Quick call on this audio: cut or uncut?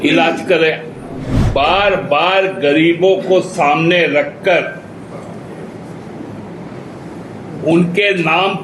cut